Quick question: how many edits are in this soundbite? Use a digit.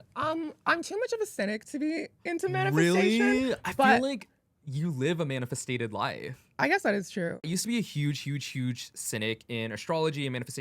1